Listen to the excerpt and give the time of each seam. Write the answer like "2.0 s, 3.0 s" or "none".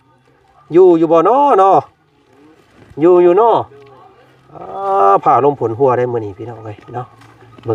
none